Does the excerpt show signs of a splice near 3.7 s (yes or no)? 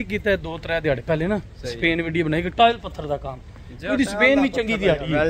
no